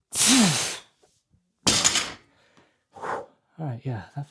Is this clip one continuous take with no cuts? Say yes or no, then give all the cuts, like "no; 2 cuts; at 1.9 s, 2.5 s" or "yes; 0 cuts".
yes; 0 cuts